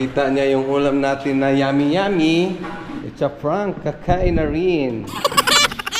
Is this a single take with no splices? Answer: yes; 0 cuts

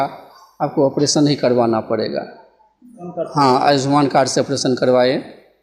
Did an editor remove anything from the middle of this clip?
no; 0 cuts

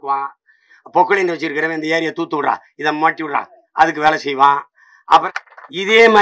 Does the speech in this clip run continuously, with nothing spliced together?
no; 1 cut; at 5.2 s

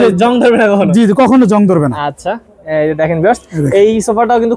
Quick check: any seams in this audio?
no; 0 cuts

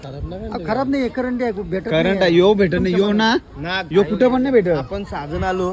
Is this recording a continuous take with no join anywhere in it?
yes; 0 cuts

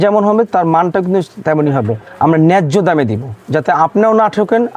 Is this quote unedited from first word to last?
yes; 0 cuts

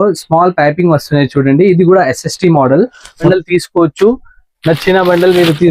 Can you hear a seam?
yes; 1 cut; at 3.2 s

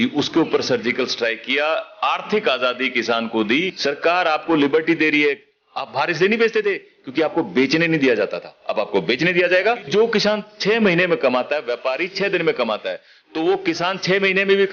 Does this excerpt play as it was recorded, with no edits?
no; 2 cuts; at 3.8 s, 9.9 s

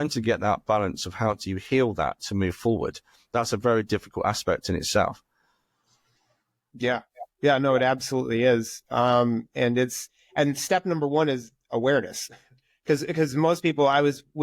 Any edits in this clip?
no; 0 cuts

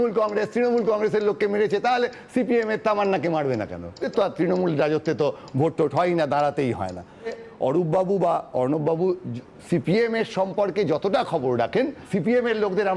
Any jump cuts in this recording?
yes; 3 cuts; at 4.0 s, 7.4 s, 12.0 s

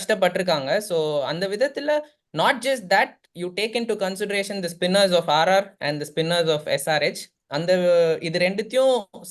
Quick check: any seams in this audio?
no; 0 cuts

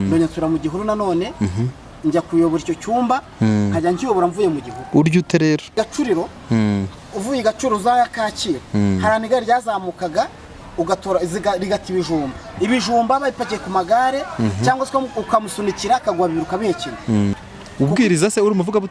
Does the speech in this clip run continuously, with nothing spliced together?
no; 3 cuts; at 5.7 s, 12.5 s, 17.4 s

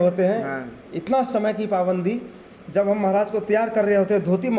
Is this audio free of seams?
yes; 0 cuts

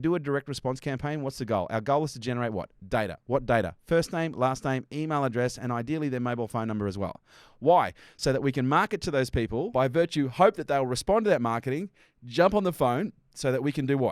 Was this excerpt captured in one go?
no; 1 cut; at 9.7 s

